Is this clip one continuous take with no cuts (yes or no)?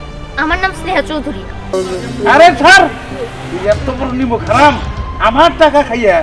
no